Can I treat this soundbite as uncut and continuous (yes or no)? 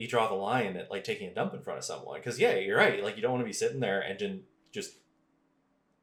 yes